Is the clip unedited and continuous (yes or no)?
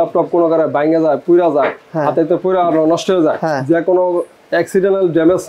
yes